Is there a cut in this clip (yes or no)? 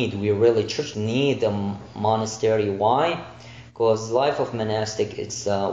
yes